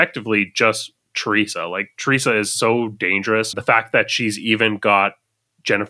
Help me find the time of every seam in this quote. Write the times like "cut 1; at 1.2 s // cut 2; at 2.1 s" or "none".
cut 1; at 3.5 s